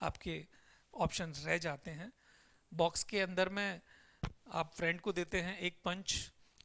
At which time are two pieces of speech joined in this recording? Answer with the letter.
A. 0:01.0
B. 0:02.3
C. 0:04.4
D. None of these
B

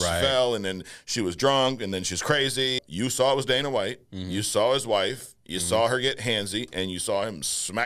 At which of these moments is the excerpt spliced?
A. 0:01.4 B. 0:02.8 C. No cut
B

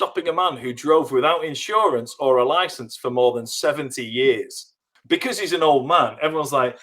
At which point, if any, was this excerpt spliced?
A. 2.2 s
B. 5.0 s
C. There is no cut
B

